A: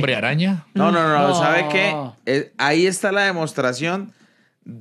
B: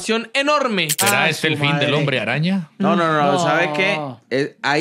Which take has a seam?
B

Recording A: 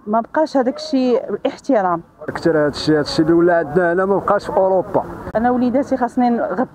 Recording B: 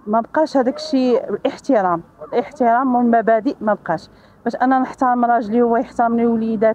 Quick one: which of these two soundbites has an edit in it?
A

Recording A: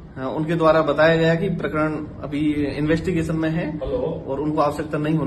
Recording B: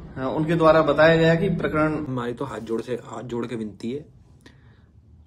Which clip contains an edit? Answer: B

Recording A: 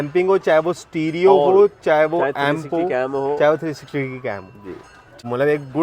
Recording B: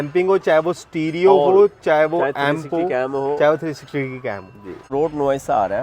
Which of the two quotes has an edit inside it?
B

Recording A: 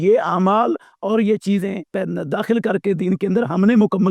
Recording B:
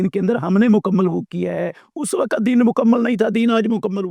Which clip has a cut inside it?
A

